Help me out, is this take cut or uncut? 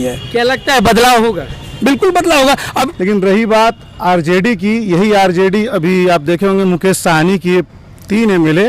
cut